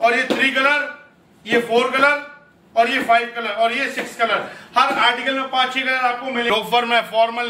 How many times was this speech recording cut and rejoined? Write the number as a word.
one